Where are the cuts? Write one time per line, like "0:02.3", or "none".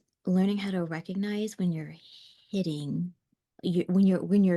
none